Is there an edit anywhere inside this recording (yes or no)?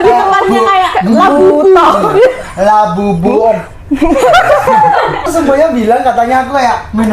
yes